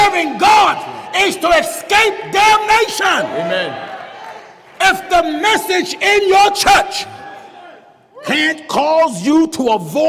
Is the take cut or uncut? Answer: uncut